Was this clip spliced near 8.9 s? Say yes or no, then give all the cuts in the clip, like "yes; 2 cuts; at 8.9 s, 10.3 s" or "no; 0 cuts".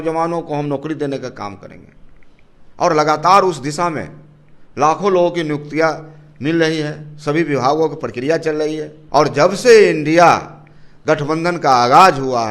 yes; 1 cut; at 8.9 s